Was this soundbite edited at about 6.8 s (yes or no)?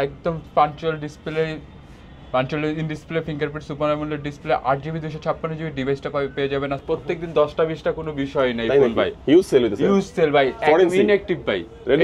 yes